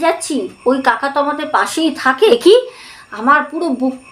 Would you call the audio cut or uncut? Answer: cut